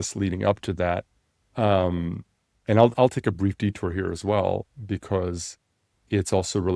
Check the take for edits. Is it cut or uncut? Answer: uncut